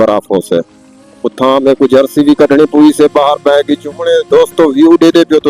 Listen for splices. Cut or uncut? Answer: cut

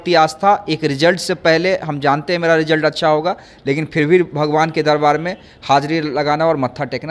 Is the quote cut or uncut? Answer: uncut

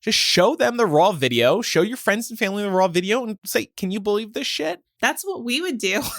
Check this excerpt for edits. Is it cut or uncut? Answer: cut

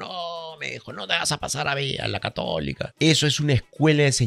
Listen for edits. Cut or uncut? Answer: cut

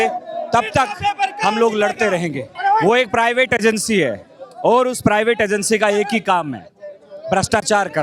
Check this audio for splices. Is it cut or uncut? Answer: cut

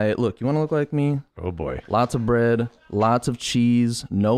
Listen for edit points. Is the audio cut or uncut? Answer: cut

